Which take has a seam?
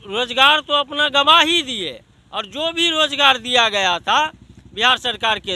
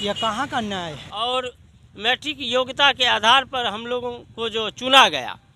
second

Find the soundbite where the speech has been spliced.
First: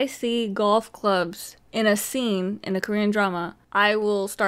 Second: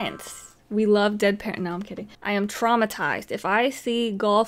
second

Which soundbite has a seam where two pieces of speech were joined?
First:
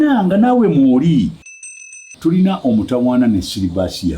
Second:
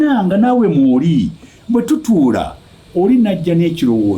first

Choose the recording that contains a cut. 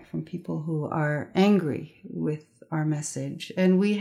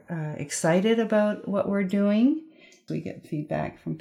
second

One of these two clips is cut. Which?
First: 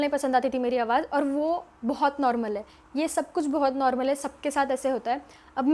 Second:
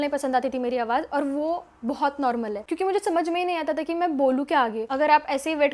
second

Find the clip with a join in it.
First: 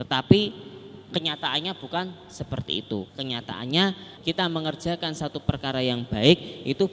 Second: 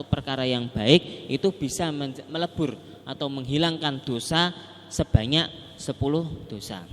first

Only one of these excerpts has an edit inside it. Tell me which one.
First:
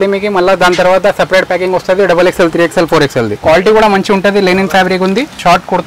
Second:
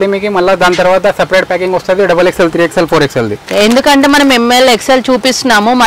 first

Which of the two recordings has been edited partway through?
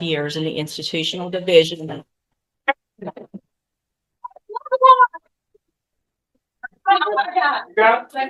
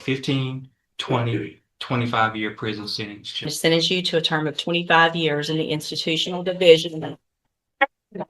second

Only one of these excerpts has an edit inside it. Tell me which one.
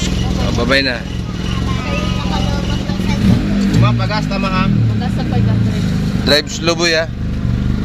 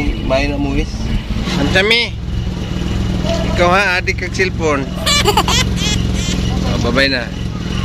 second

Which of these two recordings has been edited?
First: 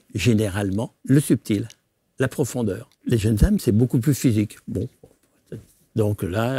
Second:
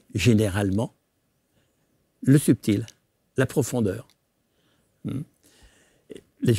first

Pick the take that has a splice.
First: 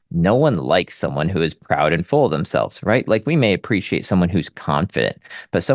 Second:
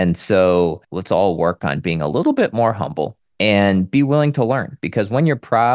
second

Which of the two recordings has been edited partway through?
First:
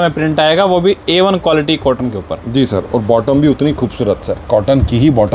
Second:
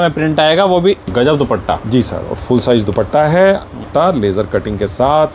second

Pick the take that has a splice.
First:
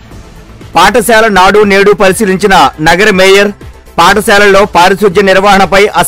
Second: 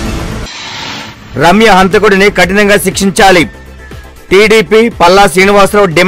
second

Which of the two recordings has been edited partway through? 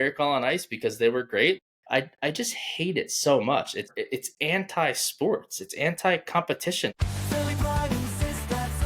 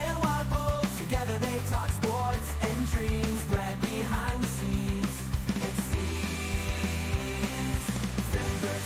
first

